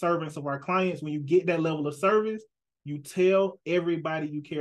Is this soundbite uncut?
yes; 0 cuts

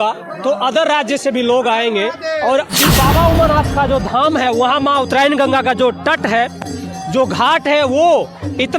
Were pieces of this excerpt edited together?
yes; 1 cut; at 2.7 s

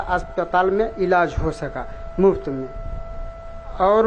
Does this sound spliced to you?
no; 0 cuts

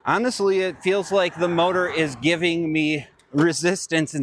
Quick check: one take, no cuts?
yes; 0 cuts

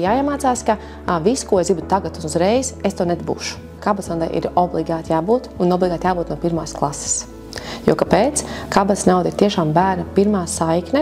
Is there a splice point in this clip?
yes; 1 cut; at 3.8 s

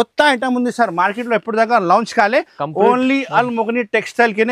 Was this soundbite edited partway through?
no; 0 cuts

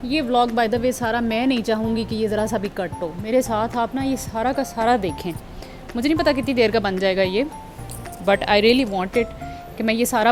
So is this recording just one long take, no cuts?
yes; 0 cuts

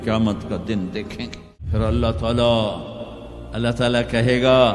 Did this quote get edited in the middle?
yes; 1 cut; at 1.5 s

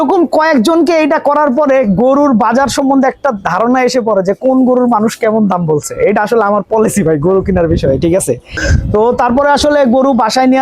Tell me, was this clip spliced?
yes; 1 cut; at 8.5 s

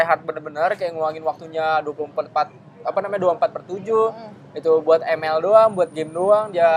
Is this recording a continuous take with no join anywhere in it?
yes; 0 cuts

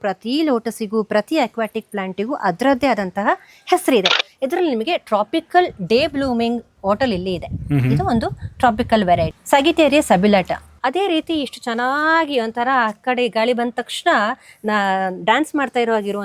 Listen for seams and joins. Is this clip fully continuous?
no; 3 cuts; at 4.2 s, 9.4 s, 10.7 s

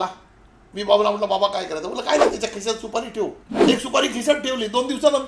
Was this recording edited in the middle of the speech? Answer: yes; 1 cut; at 3.5 s

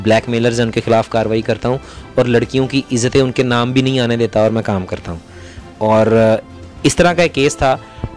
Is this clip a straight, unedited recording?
yes; 0 cuts

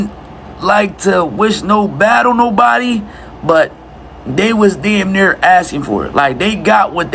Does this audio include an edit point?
no; 0 cuts

